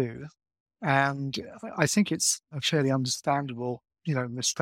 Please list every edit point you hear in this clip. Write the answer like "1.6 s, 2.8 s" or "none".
2.6 s